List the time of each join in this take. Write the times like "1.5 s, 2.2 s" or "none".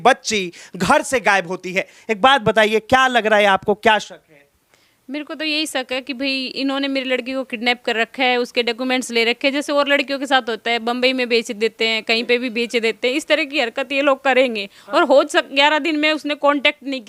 none